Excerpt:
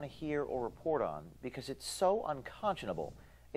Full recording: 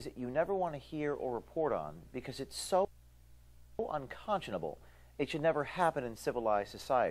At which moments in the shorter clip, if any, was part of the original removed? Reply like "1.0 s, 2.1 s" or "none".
2.1 s